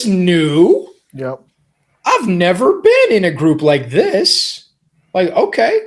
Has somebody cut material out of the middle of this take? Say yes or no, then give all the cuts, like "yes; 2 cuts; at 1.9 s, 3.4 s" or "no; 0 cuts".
no; 0 cuts